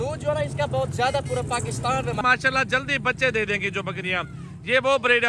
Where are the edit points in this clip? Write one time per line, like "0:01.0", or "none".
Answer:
0:02.2